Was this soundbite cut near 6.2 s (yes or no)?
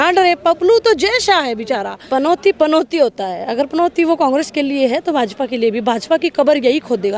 no